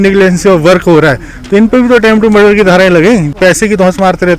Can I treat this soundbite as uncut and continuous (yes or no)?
no